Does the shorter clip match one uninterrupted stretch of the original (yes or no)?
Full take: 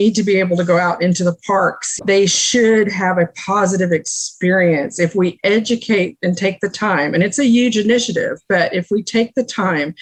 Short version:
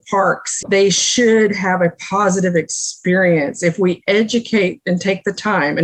yes